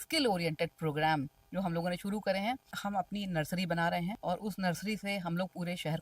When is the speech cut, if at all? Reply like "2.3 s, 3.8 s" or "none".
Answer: 2.7 s, 4.2 s

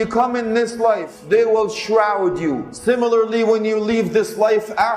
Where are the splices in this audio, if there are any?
1.1 s, 2.7 s

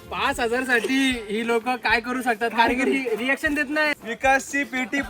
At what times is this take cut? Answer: 3.9 s

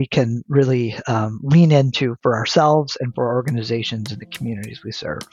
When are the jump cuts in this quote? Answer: none

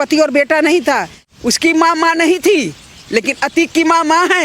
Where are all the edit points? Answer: 1.2 s

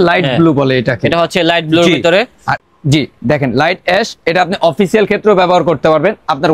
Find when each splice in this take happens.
2.5 s

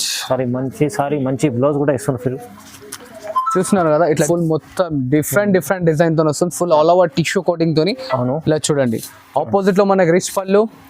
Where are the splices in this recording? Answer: 4.2 s

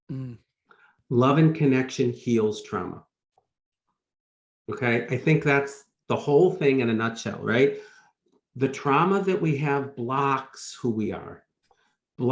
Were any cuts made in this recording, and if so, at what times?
none

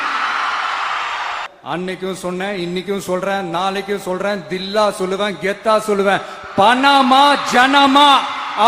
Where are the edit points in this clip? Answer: 1.5 s

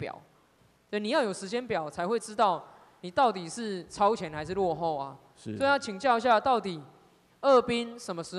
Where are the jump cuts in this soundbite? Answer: none

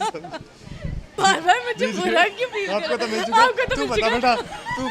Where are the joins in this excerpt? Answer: 1.0 s

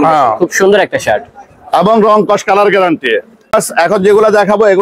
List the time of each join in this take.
3.4 s

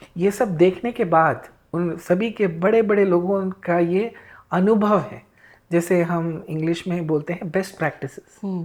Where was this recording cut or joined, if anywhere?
none

